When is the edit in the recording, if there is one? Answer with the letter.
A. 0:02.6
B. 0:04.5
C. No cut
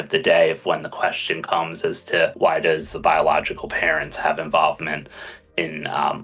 A